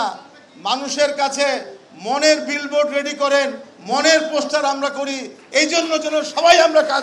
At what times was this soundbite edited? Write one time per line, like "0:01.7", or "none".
none